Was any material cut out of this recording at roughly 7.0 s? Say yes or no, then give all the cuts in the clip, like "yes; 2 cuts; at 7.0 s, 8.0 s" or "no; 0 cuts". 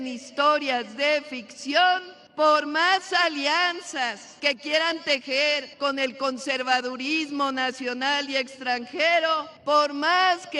no; 4 cuts; at 2.2 s, 4.2 s, 5.7 s, 9.5 s